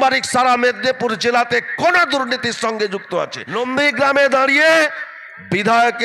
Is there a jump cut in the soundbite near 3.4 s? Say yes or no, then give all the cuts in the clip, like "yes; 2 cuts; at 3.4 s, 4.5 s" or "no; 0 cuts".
yes; 1 cut; at 3.4 s